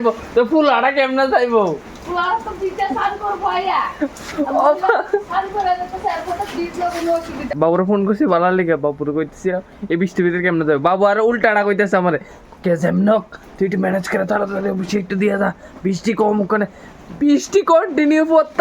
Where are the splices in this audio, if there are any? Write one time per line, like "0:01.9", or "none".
0:07.5